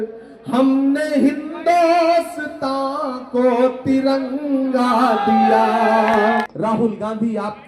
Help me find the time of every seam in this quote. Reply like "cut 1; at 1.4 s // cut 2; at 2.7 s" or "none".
cut 1; at 6.5 s